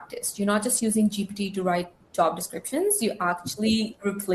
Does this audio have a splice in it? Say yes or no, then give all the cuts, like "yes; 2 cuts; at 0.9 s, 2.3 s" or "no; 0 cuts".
no; 0 cuts